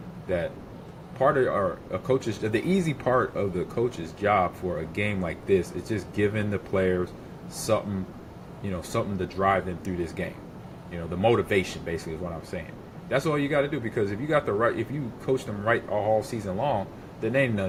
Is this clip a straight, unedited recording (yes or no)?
yes